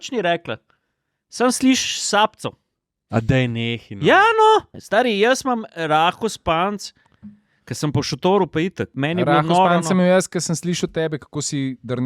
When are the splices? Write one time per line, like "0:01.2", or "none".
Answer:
0:04.8
0:08.9